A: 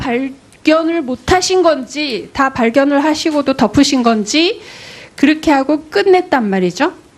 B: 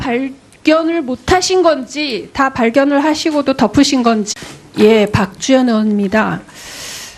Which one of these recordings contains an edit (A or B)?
A